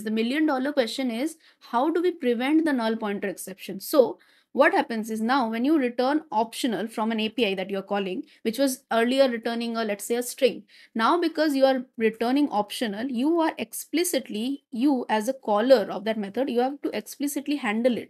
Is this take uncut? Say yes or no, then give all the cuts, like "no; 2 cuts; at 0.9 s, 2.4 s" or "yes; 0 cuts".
yes; 0 cuts